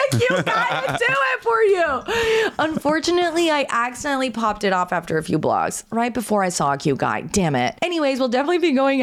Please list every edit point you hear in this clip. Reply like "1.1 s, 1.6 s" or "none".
none